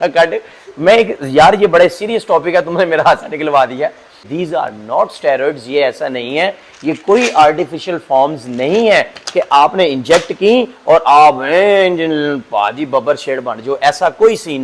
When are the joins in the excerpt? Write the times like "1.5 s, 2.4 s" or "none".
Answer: 4.3 s